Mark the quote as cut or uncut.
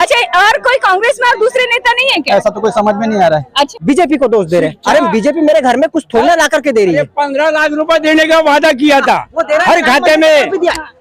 cut